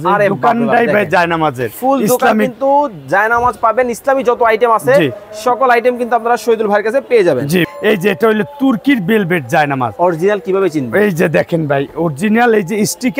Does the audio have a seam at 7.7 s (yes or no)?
yes